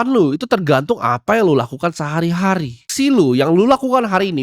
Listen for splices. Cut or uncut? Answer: cut